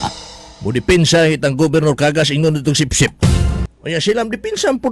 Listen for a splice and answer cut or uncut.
cut